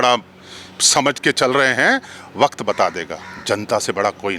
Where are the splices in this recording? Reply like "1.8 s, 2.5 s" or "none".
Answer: none